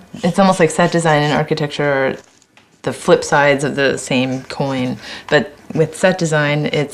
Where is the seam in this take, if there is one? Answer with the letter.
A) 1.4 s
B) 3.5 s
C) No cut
C